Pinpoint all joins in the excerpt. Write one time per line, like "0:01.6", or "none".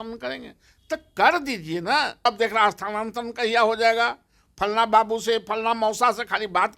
0:02.3

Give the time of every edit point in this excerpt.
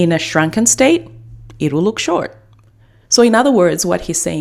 none

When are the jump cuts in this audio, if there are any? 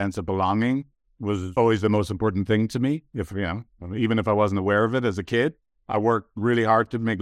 0:01.5

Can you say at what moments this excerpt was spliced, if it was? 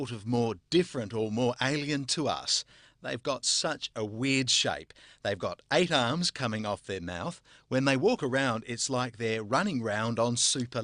0:05.0

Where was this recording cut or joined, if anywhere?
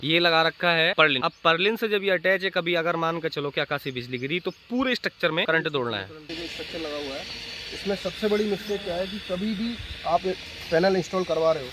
0:01.1
0:05.5
0:06.4

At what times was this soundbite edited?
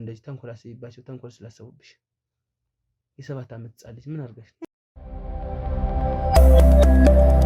0:04.6

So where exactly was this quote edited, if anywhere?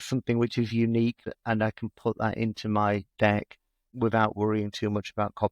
0:01.2
0:03.3

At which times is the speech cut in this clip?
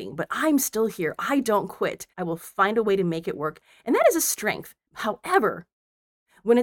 0:02.1
0:04.7

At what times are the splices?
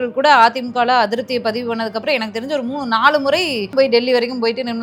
0:03.7

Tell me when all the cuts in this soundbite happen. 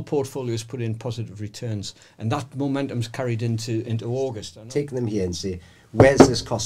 0:04.5

